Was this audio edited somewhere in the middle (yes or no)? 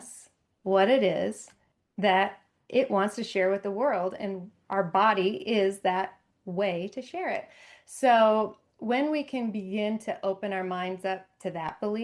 no